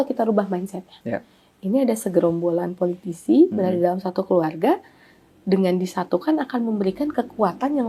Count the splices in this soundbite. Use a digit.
0